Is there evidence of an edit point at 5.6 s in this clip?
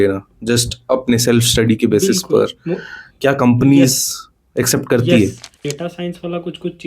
yes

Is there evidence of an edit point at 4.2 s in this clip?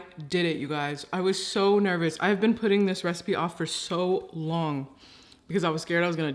no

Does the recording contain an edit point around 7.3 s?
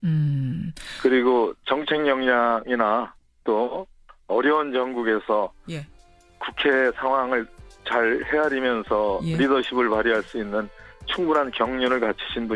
yes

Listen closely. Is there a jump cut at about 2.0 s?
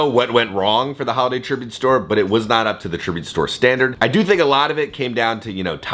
no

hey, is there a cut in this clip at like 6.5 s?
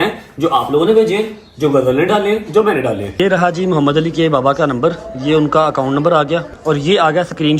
yes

